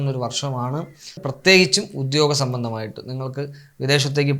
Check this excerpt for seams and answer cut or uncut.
cut